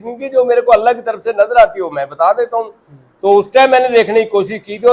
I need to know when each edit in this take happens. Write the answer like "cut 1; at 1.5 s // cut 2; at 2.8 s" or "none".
none